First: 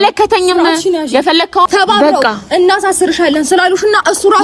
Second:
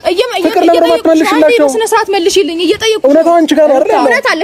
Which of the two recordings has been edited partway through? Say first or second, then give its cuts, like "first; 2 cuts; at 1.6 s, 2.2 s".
first; 1 cut; at 1.7 s